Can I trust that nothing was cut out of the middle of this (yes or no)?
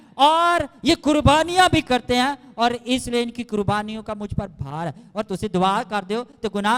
yes